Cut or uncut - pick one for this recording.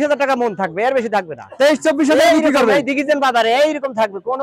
uncut